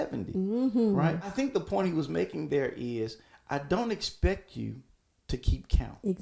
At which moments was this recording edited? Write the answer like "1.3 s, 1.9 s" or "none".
1.3 s